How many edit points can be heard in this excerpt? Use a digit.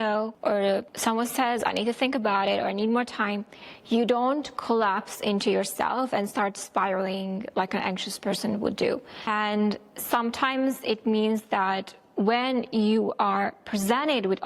1